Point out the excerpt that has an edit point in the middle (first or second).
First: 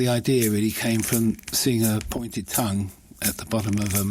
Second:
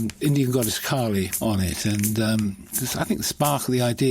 second